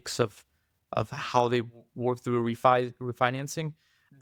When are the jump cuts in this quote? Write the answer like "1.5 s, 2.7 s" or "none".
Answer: none

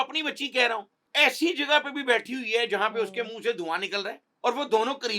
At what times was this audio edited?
1.0 s, 4.2 s

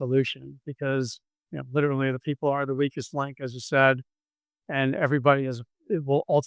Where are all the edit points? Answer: none

